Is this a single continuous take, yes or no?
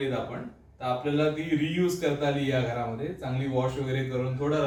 yes